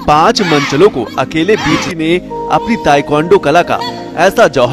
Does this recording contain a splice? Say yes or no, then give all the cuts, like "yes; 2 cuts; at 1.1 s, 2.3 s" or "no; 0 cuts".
yes; 1 cut; at 1.9 s